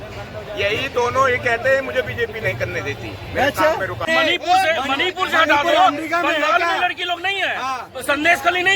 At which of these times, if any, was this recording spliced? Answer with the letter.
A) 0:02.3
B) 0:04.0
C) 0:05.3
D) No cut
B